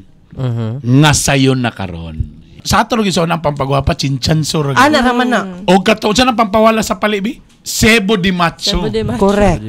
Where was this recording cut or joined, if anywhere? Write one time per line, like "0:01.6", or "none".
0:02.6